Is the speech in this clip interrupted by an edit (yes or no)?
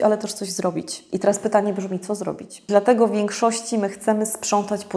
yes